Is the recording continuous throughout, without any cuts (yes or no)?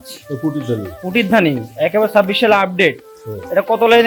yes